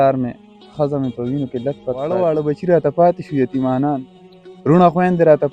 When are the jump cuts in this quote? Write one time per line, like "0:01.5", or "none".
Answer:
0:02.1